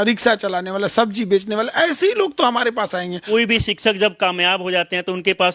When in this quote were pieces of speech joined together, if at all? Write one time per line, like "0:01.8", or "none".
0:03.2